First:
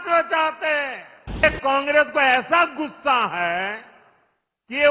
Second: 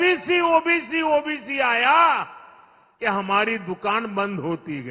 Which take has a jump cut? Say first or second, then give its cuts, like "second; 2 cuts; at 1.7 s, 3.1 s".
first; 1 cut; at 1.4 s